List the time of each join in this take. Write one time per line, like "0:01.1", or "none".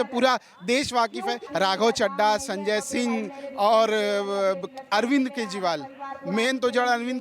0:01.4

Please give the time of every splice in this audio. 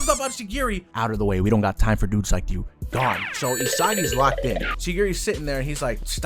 none

